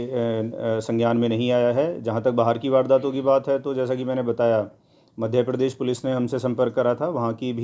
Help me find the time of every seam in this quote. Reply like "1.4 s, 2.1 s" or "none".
none